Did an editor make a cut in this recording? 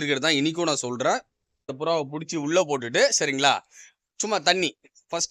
yes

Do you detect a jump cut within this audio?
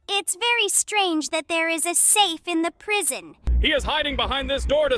yes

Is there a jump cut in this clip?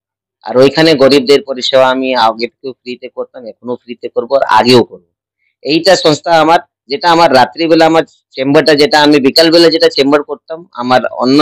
no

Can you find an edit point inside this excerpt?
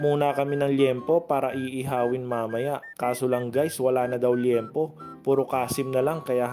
no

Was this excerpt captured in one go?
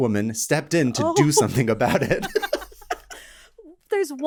yes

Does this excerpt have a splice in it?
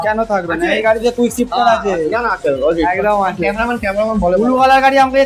no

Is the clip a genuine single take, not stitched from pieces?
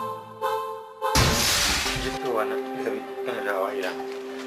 no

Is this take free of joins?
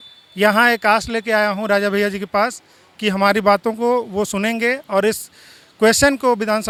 yes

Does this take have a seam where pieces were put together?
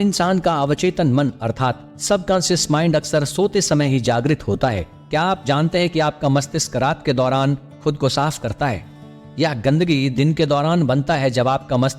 yes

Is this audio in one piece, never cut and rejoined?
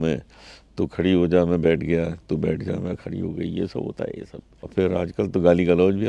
no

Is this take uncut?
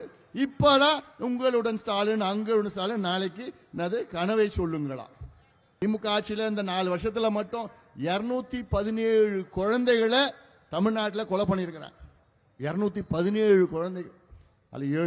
no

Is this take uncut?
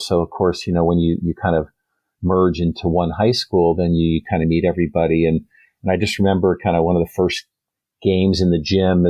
yes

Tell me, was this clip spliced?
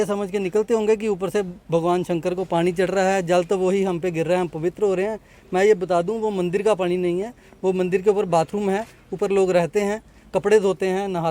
no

